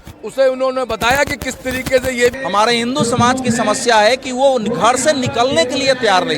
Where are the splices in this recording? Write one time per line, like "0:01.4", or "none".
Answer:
0:02.4